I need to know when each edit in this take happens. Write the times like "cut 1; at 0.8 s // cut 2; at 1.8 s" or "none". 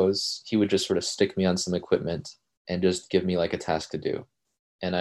none